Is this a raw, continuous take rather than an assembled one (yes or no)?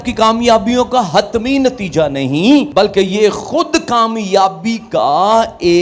no